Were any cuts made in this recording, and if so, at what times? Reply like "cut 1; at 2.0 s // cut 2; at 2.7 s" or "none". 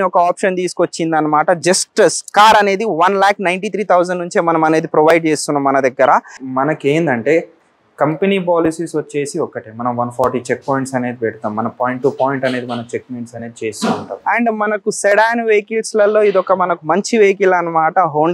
cut 1; at 6.4 s // cut 2; at 14.1 s